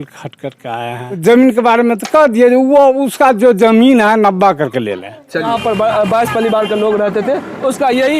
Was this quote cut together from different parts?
yes; 2 cuts; at 1.2 s, 5.5 s

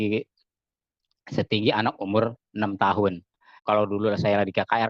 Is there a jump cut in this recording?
yes; 1 cut; at 3.6 s

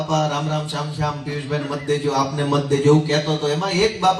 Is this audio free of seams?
yes; 0 cuts

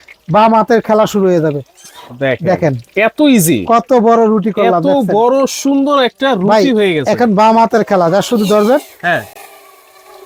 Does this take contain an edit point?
no; 0 cuts

